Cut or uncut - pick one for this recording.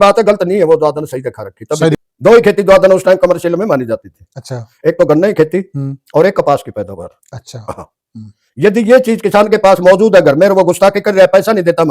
cut